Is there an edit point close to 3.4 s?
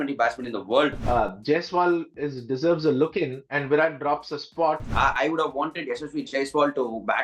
no; 2 cuts; at 1.0 s, 4.8 s

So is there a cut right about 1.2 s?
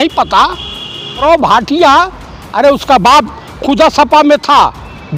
yes; 1 cut; at 1.2 s

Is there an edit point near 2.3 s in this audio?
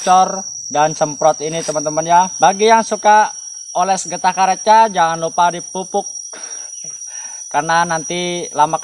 yes; 1 cut; at 2.3 s

